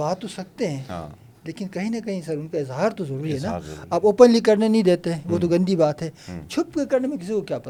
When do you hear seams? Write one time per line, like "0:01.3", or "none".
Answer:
none